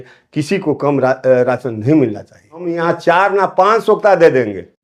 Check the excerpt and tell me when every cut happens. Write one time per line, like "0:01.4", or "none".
0:02.7